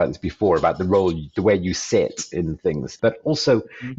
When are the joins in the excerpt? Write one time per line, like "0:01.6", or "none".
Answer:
0:02.9